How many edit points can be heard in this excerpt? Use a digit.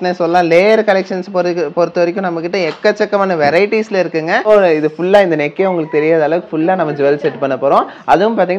1